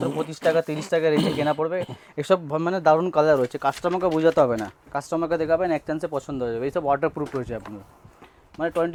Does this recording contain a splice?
no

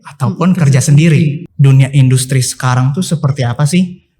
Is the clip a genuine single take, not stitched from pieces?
no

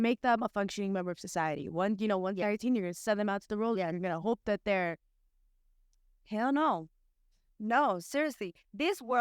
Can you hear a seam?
yes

